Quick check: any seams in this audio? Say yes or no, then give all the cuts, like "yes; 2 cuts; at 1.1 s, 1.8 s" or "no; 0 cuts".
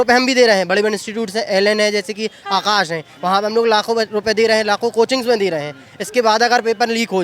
no; 0 cuts